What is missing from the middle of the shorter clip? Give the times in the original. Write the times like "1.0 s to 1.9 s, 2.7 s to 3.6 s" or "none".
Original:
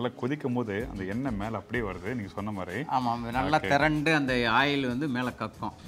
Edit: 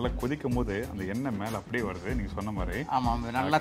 none

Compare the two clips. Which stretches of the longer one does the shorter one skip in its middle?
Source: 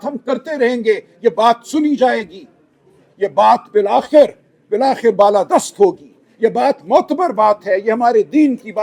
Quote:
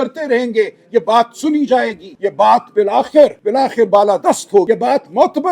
2.3 s to 3.0 s, 4.4 s to 4.7 s, 5.9 s to 6.4 s

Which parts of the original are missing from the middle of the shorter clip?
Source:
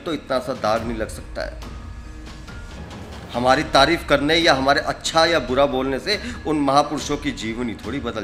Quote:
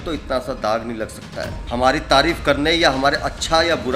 1.6 s to 3.2 s

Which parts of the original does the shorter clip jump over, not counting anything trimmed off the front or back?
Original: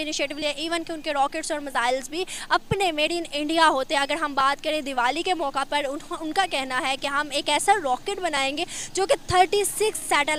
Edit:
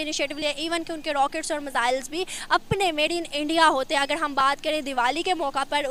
none

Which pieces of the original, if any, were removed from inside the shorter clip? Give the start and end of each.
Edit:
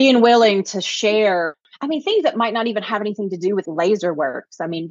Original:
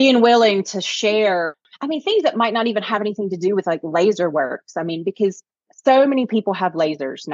3.6 s to 3.8 s

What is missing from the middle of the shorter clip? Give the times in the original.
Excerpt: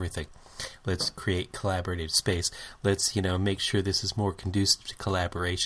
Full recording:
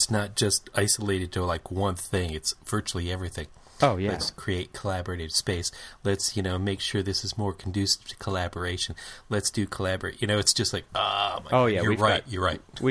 none

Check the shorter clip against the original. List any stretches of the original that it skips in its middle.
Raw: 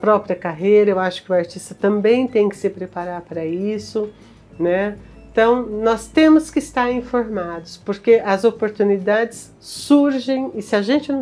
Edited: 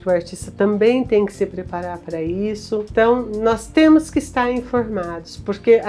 4.1 s to 5.3 s

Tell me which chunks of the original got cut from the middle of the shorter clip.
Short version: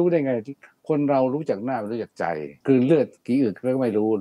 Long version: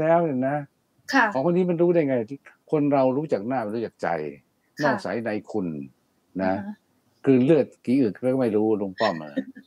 4.3 s to 7.1 s

